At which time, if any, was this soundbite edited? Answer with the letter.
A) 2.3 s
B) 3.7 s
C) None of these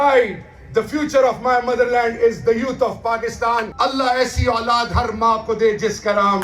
B